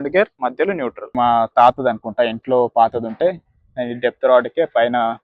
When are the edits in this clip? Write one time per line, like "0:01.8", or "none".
0:01.1